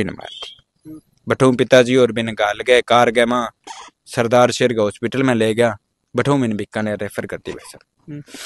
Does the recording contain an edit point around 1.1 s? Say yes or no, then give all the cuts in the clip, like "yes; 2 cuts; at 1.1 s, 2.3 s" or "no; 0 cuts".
no; 0 cuts